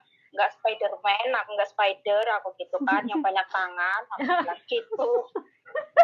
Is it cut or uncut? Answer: uncut